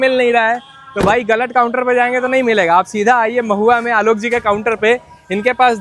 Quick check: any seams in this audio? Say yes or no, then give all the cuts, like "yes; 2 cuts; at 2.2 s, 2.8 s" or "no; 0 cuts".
no; 0 cuts